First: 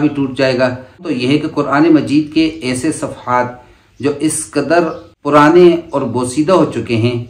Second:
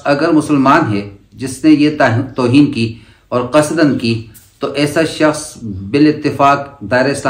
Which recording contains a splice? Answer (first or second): first